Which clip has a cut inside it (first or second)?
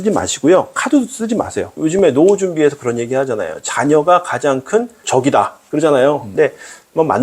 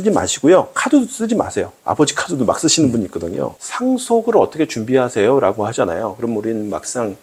first